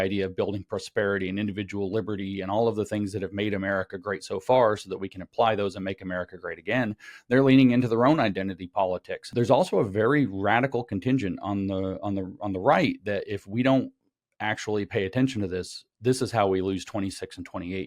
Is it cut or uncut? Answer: cut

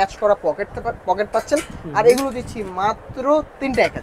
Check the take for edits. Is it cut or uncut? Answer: uncut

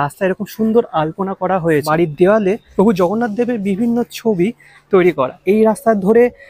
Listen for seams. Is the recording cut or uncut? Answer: cut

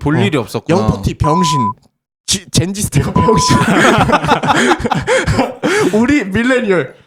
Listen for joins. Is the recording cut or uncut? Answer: uncut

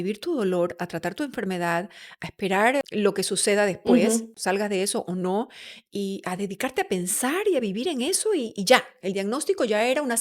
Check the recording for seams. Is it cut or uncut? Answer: cut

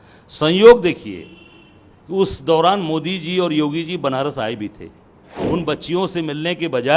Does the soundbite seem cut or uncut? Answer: cut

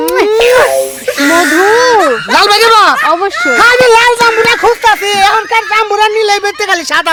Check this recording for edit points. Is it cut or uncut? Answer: uncut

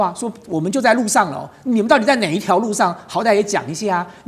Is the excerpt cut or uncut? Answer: uncut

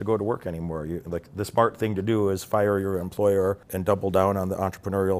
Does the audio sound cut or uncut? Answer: cut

